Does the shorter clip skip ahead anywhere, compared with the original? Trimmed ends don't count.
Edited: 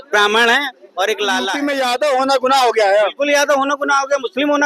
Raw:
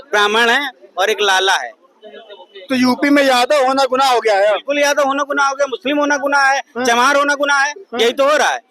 yes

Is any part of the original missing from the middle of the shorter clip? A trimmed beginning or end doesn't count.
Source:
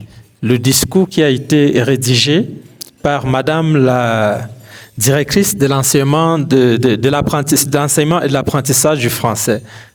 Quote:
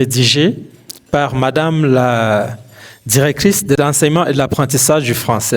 yes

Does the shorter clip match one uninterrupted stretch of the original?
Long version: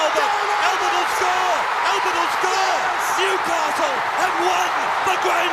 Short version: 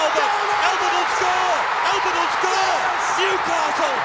yes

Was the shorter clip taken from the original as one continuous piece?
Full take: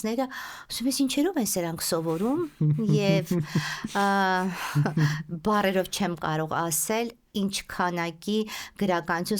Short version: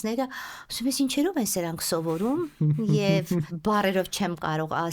no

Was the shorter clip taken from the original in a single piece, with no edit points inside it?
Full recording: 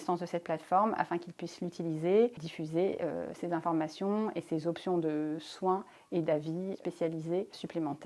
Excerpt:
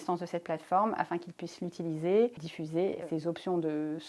no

